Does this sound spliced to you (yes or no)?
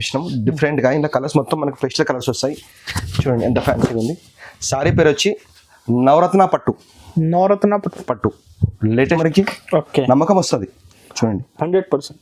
yes